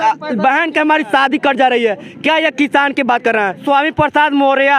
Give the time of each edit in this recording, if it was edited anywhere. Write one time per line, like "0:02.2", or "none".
0:03.6